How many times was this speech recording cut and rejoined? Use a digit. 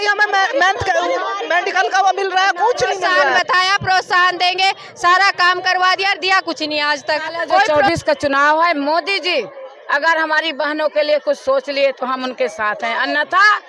2